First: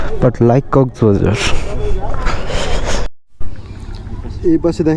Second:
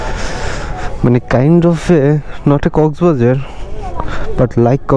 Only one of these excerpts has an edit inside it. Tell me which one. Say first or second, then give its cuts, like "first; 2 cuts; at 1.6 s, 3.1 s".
first; 1 cut; at 3.0 s